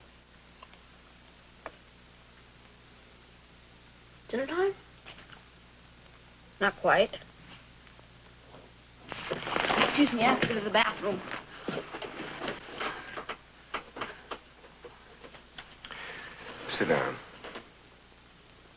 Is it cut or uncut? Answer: cut